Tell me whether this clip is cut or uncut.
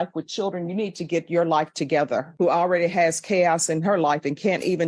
cut